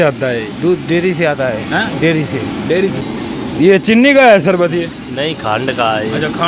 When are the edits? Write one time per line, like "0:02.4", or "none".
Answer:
0:03.0

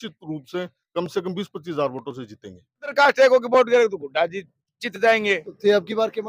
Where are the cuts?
0:02.9

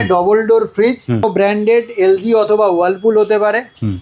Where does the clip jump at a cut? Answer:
0:01.2

